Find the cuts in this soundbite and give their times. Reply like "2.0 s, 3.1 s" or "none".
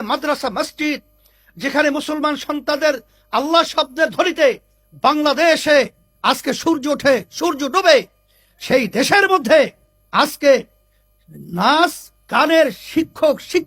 none

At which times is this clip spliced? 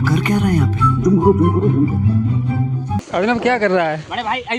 3.0 s

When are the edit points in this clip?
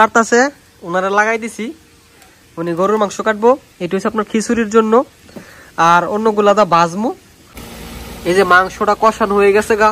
7.6 s

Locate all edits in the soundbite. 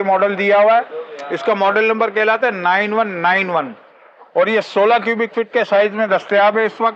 none

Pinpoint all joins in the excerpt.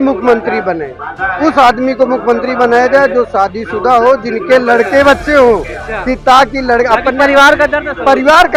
none

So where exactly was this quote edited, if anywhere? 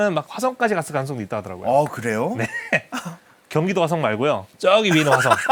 none

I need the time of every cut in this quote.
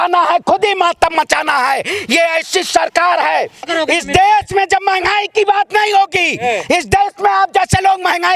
3.7 s

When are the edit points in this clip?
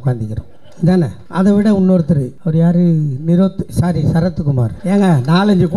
1.2 s, 2.3 s, 4.7 s

